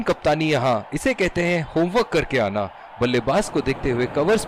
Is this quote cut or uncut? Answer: uncut